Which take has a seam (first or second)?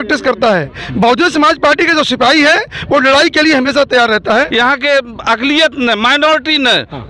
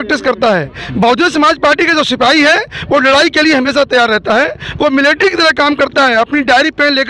first